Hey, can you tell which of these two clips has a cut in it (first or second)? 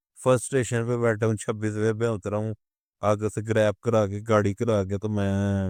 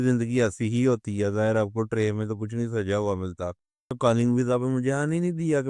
second